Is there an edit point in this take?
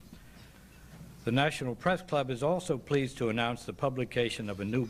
yes; 1 cut; at 1.1 s

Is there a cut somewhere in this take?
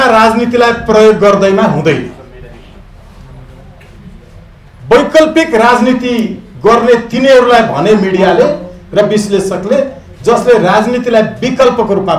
no; 0 cuts

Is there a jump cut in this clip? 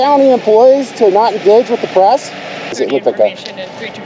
yes; 1 cut; at 2.7 s

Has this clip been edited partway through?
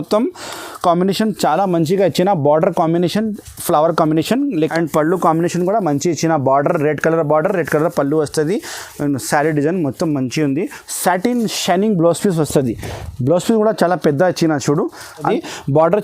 yes; 3 cuts; at 4.6 s, 10.8 s, 15.2 s

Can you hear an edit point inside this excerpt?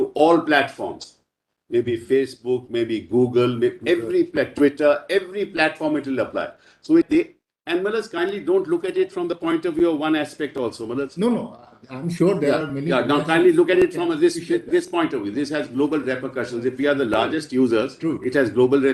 yes; 1 cut; at 7.1 s

